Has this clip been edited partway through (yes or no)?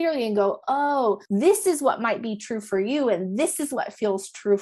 yes